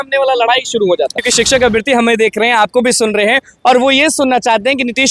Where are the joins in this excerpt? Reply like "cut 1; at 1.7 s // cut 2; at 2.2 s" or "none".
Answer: cut 1; at 1.2 s